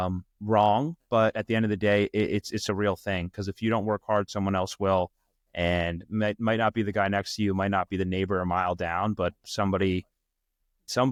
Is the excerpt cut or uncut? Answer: uncut